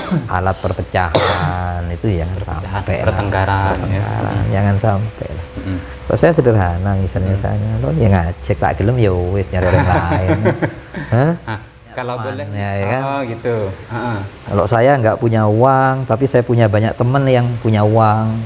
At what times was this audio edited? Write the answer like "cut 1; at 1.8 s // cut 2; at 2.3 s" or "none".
cut 1; at 12.4 s